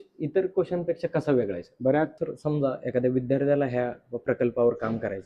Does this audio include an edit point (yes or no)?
yes